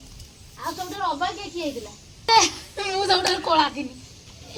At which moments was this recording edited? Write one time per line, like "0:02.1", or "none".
0:02.3